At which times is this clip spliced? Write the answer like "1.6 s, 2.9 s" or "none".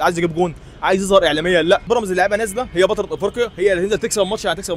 1.8 s